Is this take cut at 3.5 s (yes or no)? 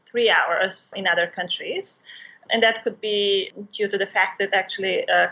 yes